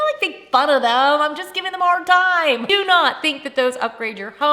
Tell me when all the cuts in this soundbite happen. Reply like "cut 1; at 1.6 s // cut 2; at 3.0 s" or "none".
cut 1; at 2.7 s